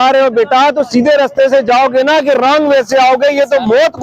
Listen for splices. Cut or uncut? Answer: uncut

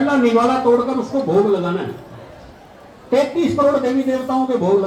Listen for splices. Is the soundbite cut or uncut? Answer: uncut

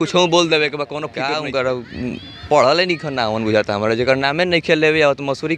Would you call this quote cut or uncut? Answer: cut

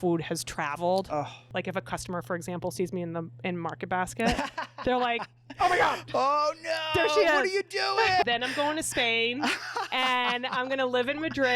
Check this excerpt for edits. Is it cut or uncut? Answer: cut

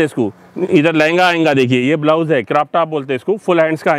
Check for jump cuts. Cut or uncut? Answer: uncut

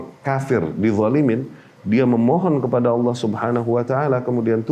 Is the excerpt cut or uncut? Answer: uncut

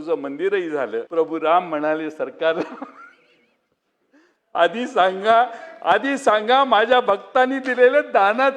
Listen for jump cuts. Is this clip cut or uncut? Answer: cut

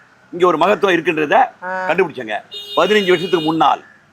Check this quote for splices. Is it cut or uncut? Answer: uncut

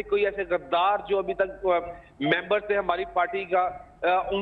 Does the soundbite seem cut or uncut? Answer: uncut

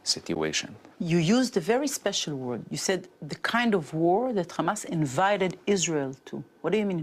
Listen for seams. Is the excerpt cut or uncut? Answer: uncut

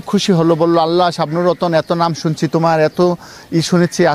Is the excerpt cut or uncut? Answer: uncut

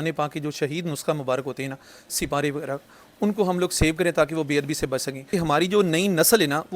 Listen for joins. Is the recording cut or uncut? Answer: cut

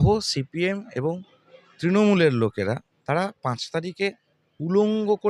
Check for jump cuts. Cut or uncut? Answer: cut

